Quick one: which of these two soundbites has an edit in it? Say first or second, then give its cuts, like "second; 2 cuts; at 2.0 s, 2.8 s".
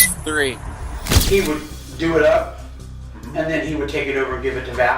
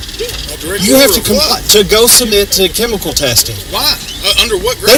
first; 1 cut; at 1.0 s